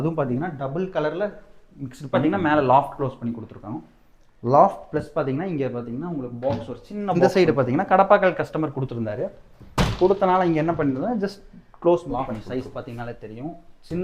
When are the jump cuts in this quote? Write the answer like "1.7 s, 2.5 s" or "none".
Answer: 2.1 s, 7.2 s, 12.1 s